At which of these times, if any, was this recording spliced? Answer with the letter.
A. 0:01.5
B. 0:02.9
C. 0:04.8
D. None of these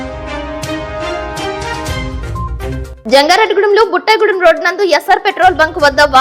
B